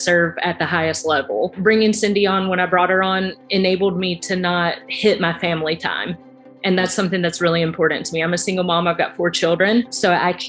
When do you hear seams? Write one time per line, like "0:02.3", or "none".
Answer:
0:01.6